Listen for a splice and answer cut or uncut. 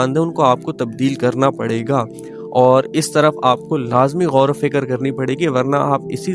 uncut